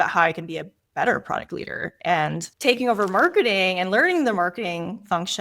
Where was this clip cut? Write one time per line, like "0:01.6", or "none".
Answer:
none